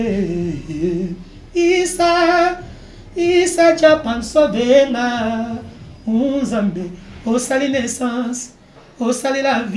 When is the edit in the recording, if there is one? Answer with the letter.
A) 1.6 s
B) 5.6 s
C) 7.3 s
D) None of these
D